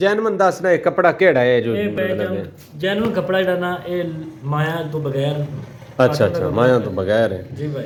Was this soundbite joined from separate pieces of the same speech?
no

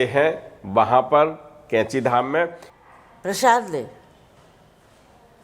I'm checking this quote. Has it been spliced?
yes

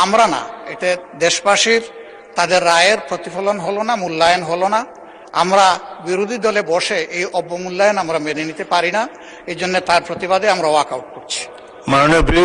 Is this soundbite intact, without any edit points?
yes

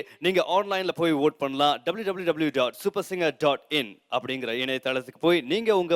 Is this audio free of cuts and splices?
yes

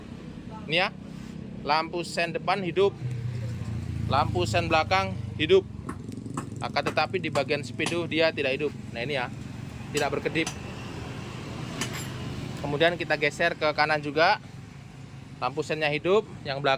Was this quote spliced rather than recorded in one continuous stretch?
no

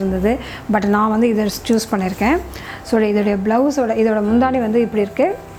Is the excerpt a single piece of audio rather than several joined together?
yes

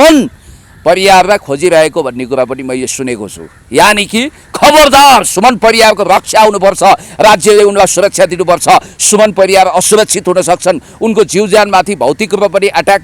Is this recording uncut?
yes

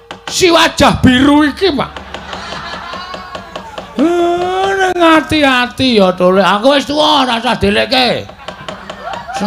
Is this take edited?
no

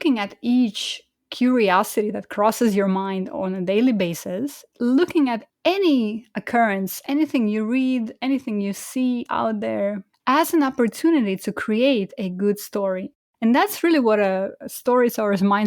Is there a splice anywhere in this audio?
yes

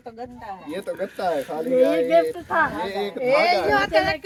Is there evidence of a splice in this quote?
no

